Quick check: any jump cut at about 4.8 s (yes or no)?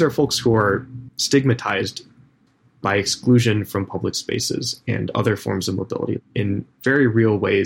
no